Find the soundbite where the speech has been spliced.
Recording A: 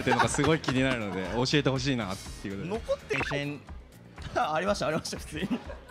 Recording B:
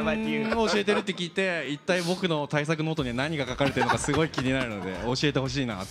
A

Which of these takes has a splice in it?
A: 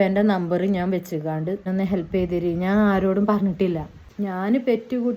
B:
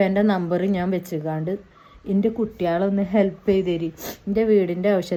A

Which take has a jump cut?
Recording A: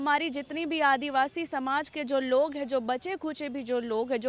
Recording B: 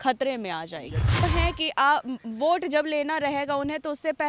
B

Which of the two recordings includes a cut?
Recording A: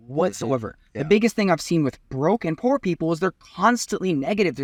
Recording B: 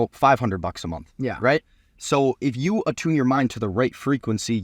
B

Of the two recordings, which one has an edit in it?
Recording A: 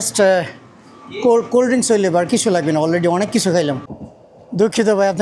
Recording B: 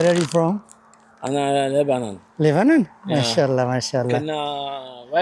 A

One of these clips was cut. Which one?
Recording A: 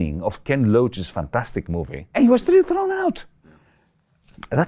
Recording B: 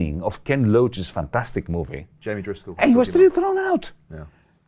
A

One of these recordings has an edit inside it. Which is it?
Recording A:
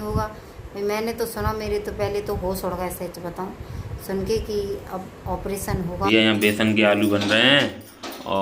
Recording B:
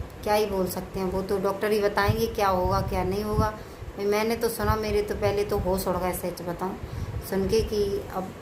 A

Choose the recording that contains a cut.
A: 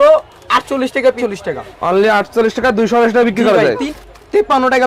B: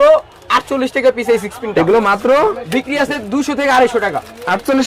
A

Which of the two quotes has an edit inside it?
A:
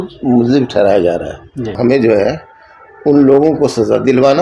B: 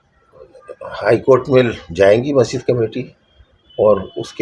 A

